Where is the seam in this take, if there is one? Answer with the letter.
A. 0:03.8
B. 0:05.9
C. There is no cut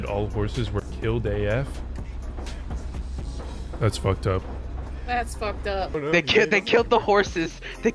B